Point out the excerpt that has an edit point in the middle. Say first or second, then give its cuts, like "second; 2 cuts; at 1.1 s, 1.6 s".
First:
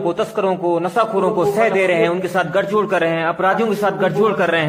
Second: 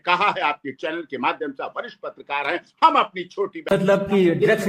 second; 1 cut; at 3.7 s